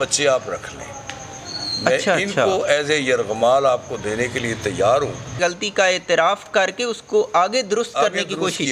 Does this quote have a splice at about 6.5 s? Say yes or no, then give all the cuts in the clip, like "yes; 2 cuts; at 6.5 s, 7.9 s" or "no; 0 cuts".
yes; 2 cuts; at 5.3 s, 6.5 s